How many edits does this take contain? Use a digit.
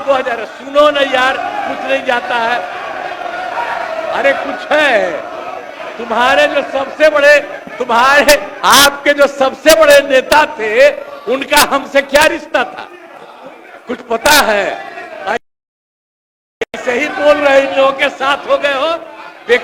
0